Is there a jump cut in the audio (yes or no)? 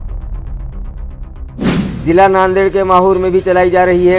yes